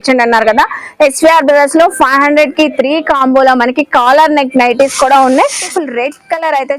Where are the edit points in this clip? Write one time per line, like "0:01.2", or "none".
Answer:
0:05.7

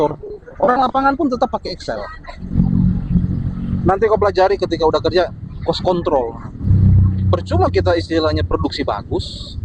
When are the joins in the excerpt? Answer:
0:02.5
0:06.7

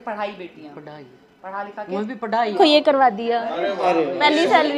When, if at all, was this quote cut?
0:02.6

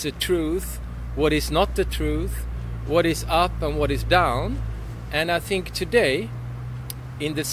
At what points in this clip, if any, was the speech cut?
none

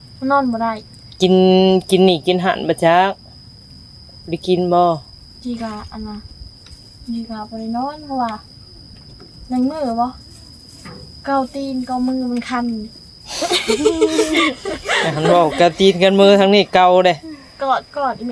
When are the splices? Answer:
none

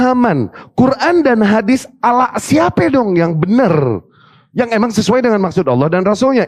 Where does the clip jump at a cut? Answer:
none

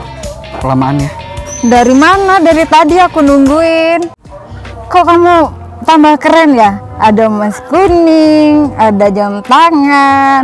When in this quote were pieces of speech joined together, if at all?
0:04.3

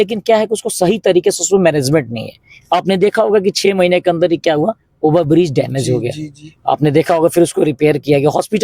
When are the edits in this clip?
none

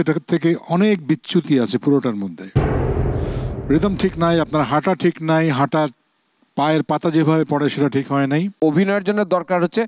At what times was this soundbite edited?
0:08.5

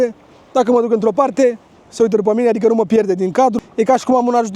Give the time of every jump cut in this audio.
0:03.6

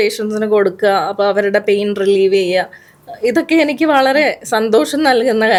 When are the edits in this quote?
none

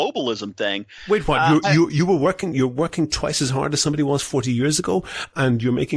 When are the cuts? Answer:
none

